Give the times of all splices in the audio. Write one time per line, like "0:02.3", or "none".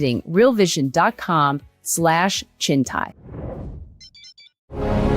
0:03.2